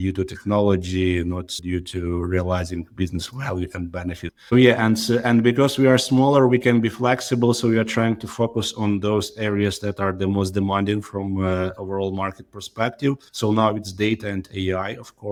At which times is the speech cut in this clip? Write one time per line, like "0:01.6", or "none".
none